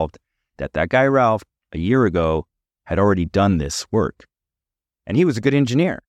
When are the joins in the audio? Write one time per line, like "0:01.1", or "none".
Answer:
none